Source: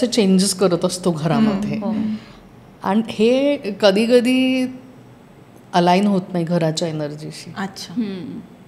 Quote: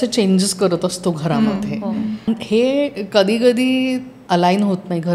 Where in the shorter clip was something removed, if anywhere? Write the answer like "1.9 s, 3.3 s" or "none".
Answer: 2.3 s, 4.1 s